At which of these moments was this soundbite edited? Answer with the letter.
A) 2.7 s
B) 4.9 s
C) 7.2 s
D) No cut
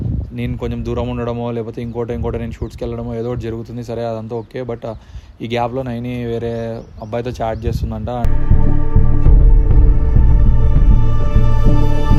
D